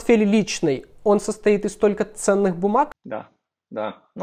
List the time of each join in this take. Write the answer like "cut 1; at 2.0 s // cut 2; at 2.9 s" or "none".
cut 1; at 3.0 s